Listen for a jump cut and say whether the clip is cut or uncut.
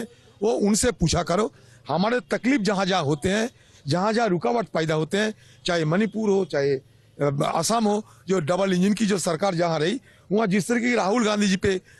uncut